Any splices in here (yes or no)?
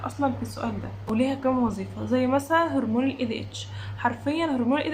yes